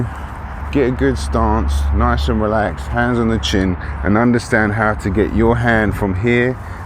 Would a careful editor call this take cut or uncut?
uncut